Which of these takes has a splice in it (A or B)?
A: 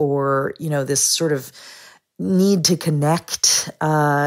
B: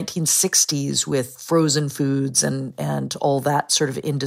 B